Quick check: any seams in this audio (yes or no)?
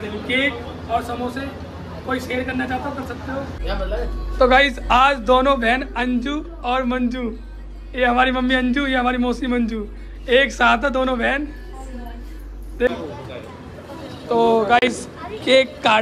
yes